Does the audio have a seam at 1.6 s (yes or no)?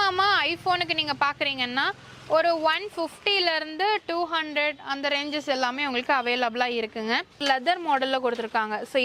no